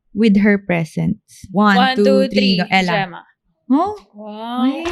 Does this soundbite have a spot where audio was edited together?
yes; 1 cut; at 1.5 s

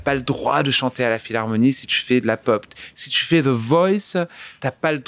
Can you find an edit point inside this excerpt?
no; 0 cuts

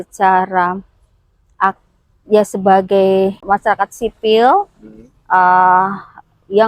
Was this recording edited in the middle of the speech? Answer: yes; 1 cut; at 3.4 s

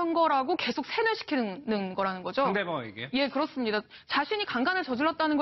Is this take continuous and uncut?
no; 1 cut; at 1.9 s

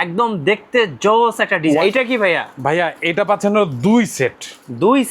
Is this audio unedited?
no; 1 cut; at 1.8 s

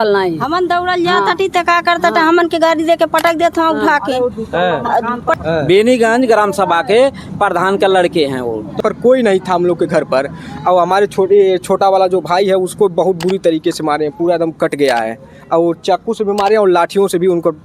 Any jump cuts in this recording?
yes; 2 cuts; at 5.3 s, 8.8 s

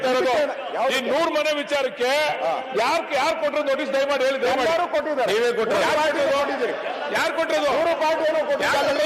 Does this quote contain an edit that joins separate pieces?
no; 0 cuts

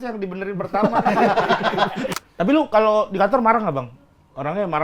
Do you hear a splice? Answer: yes; 1 cut; at 2.1 s

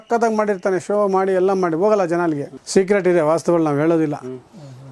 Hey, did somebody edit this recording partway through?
yes; 1 cut; at 2.5 s

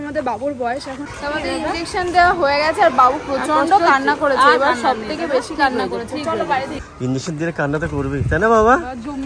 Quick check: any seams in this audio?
yes; 2 cuts; at 1.0 s, 6.8 s

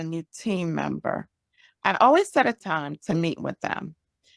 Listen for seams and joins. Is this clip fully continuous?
no; 1 cut; at 2.6 s

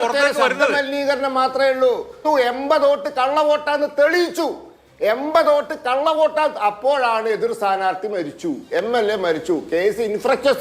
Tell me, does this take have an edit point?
yes; 1 cut; at 2.2 s

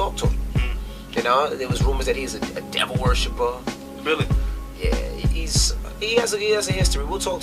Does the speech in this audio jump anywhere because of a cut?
no; 0 cuts

